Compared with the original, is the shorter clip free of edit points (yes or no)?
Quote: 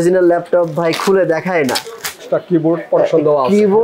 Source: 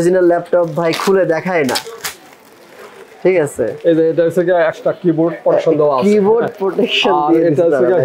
no